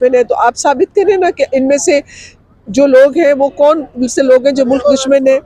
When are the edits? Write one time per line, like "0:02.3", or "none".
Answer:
none